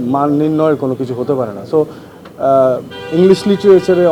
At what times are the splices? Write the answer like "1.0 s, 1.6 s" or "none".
none